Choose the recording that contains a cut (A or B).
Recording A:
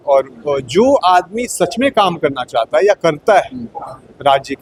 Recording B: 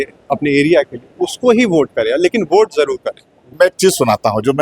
B